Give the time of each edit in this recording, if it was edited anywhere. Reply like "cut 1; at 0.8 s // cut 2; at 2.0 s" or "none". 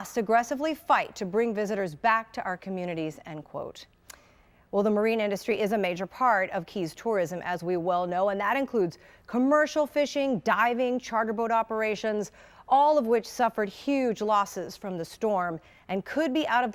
cut 1; at 7.4 s